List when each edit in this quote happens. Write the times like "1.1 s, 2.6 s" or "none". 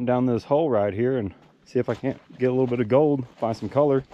none